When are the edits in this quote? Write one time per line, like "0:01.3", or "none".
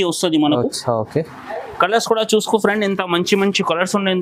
none